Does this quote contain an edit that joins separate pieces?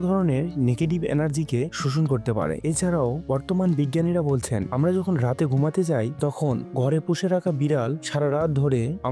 no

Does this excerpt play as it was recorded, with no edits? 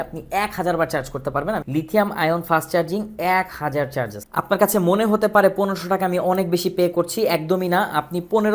yes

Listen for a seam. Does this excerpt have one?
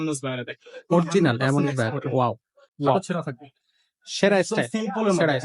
yes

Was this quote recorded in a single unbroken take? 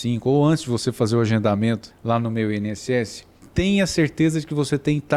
no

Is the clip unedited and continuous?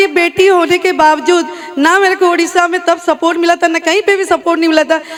yes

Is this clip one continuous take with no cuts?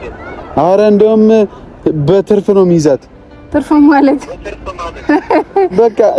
yes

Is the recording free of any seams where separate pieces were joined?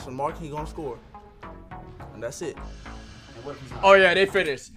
yes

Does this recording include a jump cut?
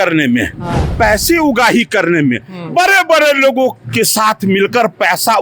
no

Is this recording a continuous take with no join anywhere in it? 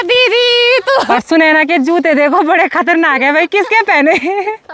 no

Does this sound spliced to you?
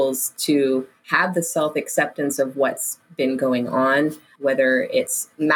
yes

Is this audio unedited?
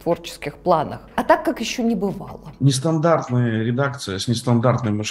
no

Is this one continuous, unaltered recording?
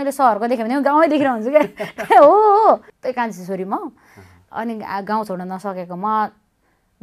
no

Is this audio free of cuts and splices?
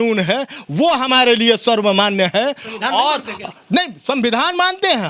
yes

